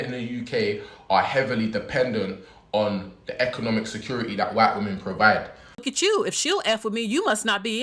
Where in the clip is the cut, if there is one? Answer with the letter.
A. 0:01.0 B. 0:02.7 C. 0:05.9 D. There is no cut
C